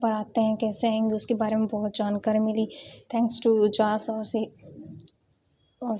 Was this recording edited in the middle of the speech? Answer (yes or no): no